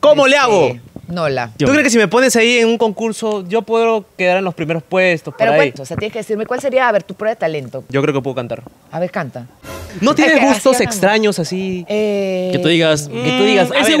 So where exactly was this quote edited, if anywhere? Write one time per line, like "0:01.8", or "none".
0:01.5
0:05.8
0:07.8
0:09.7